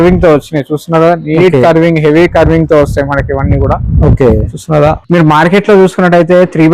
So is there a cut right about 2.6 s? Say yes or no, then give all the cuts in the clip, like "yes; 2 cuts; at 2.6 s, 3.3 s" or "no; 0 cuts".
no; 1 cut; at 5.0 s